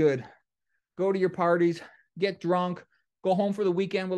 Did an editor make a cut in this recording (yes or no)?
no